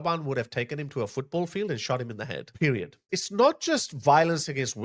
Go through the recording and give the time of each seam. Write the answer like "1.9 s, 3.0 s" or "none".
3.0 s